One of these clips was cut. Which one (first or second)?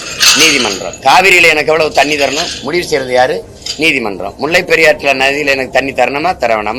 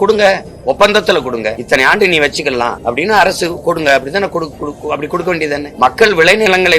second